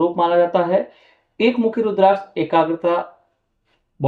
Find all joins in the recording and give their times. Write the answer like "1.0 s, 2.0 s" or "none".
none